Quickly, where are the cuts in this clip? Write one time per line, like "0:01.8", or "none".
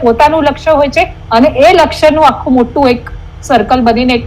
none